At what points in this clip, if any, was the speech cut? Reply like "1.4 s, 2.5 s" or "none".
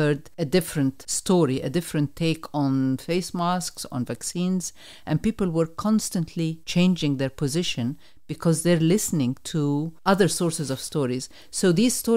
0.7 s, 6.6 s, 9.9 s